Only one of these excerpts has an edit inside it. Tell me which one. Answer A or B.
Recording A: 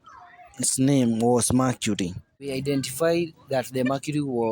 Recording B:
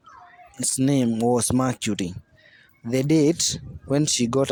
A